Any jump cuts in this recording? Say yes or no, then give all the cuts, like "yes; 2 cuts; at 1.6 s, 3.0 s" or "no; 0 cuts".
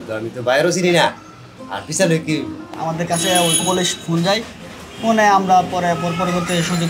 yes; 1 cut; at 2.7 s